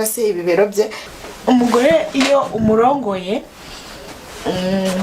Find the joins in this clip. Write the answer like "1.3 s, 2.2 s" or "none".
1.1 s